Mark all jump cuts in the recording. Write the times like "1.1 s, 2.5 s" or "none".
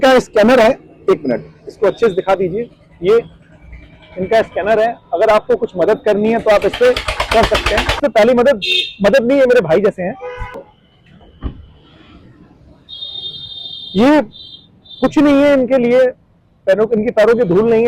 8.0 s